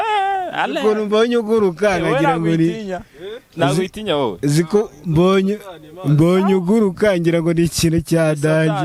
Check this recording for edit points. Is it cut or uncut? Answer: uncut